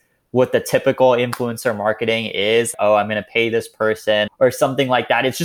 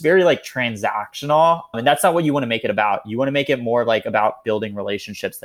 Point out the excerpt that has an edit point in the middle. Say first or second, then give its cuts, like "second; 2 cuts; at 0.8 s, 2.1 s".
first; 2 cuts; at 2.7 s, 4.4 s